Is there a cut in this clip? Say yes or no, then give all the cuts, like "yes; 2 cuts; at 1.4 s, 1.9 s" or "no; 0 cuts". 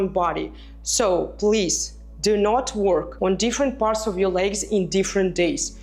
no; 0 cuts